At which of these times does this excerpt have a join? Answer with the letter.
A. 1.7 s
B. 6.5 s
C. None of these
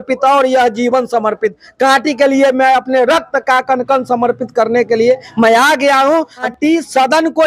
B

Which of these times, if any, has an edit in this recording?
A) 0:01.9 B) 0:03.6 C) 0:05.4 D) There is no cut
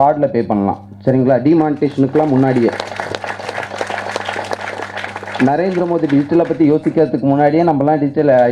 D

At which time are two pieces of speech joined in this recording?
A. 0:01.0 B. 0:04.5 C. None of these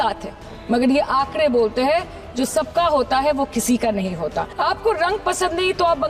B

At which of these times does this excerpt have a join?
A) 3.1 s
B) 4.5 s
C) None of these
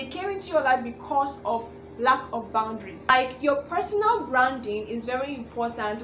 A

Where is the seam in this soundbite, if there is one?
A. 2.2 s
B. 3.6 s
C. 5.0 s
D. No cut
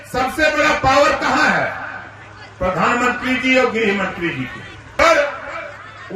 C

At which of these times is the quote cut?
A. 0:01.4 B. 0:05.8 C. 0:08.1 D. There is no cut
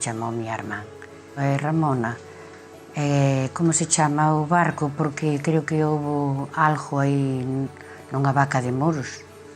A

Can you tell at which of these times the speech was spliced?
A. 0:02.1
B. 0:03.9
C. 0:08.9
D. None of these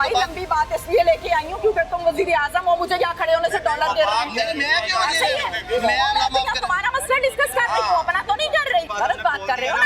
C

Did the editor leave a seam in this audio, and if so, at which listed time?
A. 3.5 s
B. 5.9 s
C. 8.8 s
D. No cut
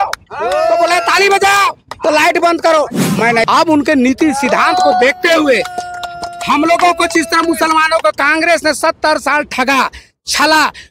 A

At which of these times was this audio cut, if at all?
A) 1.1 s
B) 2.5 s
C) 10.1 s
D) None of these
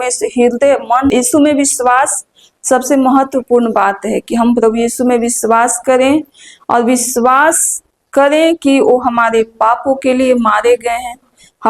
A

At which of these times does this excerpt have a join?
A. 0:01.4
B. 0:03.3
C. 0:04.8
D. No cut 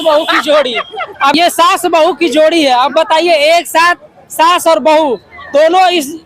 A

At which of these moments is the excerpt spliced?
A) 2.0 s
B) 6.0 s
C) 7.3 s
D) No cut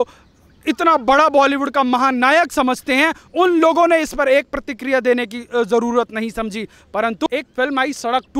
C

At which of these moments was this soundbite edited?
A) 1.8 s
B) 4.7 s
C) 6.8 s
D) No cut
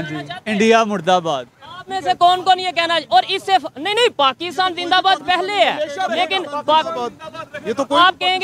D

